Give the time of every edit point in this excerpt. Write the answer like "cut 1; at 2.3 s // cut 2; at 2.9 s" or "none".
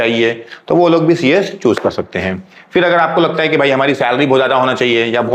none